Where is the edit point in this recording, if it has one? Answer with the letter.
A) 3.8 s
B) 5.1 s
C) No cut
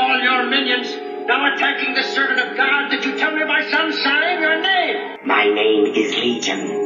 B